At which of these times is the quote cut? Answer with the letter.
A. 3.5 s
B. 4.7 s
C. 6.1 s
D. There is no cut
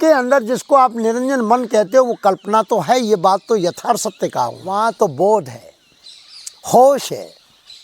B